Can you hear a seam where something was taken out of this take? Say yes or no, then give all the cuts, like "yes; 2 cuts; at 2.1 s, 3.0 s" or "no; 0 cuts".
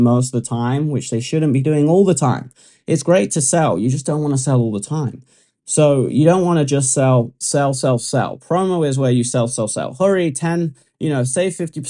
no; 0 cuts